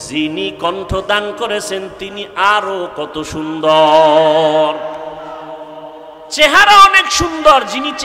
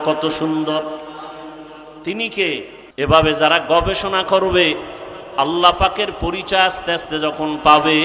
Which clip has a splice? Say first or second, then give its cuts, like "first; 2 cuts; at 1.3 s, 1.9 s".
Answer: second; 1 cut; at 2.8 s